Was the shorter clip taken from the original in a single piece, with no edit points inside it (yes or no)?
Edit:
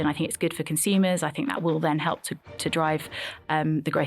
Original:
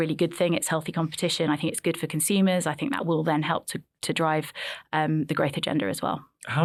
yes